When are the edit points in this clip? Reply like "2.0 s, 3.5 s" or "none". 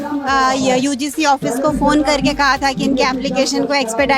none